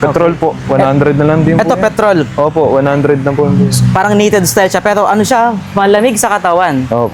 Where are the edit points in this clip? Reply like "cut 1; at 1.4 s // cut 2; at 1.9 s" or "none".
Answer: none